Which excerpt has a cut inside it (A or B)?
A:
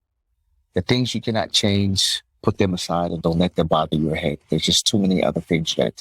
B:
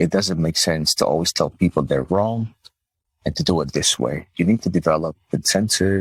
A